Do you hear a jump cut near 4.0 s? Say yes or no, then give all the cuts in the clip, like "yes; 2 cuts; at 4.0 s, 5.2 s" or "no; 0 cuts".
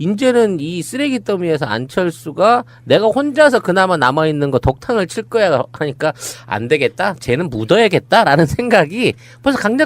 yes; 1 cut; at 4.0 s